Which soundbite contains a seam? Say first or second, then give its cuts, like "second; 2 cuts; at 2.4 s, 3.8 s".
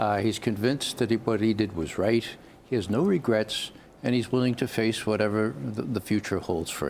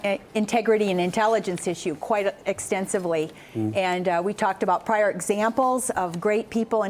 first; 1 cut; at 4.2 s